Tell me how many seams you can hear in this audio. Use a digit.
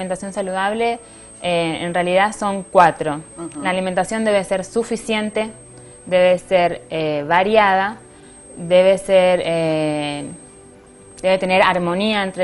1